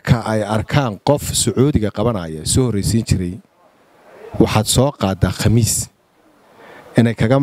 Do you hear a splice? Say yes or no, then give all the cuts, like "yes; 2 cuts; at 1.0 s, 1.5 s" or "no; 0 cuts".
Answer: no; 0 cuts